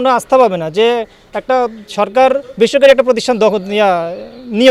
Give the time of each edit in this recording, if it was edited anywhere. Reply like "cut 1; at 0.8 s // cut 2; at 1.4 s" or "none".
none